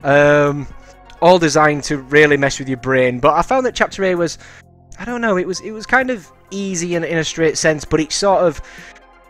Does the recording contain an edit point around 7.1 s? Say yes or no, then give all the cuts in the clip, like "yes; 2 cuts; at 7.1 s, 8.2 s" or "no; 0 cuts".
no; 1 cut; at 1.4 s